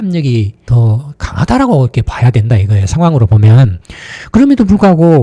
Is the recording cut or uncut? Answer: uncut